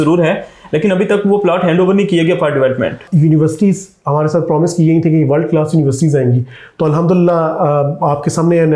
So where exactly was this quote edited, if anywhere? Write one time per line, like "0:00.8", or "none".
0:03.0